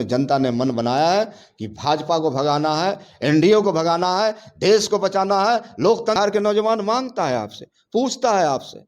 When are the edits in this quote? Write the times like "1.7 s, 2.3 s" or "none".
6.2 s